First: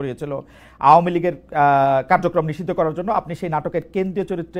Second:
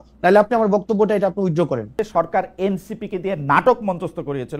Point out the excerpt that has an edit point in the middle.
second; 1 cut; at 2.0 s

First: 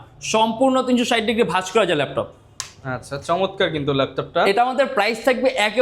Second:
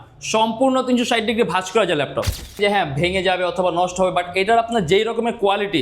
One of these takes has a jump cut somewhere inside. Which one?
second; 1 cut; at 2.6 s

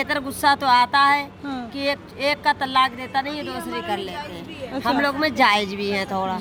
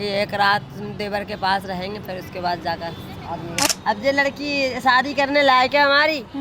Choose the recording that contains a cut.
second; 1 cut; at 3.7 s

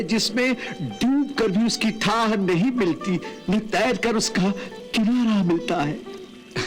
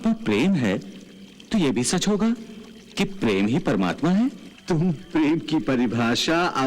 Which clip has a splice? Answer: second; 1 cut; at 4.5 s

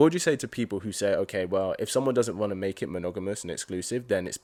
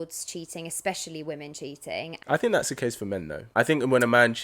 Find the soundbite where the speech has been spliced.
second; 2 cuts; at 2.2 s, 3.4 s

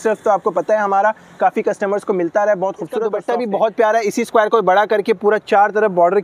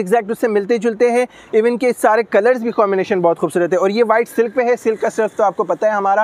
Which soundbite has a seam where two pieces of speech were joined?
first; 1 cut; at 3.2 s

